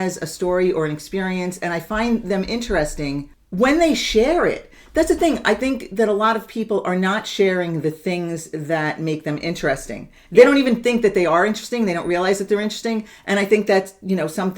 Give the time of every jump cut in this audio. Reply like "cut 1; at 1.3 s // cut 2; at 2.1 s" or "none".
cut 1; at 3.4 s